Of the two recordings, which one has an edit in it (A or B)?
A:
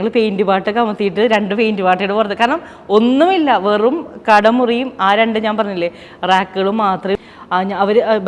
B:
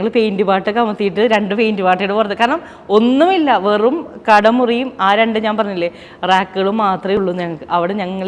A